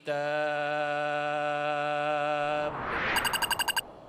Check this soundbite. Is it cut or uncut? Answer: cut